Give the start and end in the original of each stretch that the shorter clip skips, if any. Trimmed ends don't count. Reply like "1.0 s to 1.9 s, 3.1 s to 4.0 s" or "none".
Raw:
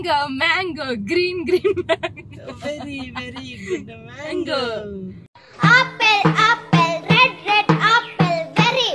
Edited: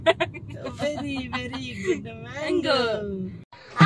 none